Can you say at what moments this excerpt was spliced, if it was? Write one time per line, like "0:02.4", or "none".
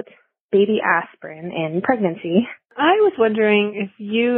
0:02.7